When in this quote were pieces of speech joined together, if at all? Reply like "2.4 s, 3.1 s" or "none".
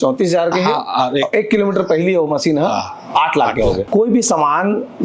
3.8 s